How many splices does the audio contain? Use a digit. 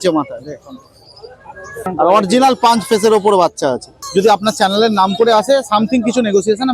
2